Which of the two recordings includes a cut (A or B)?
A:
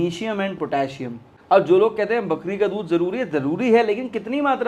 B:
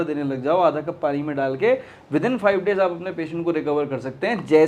A